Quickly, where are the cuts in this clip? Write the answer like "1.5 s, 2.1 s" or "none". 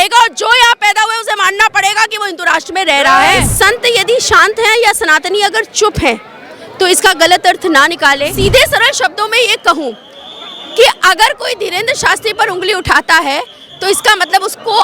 3.5 s, 8.3 s

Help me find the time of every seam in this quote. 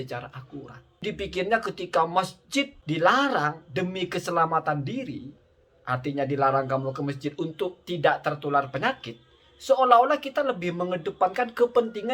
1.0 s, 2.8 s

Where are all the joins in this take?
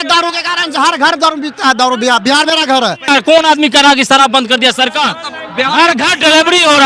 3.0 s

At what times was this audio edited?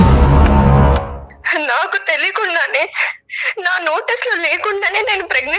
1.2 s

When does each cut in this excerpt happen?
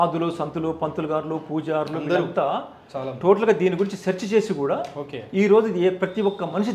none

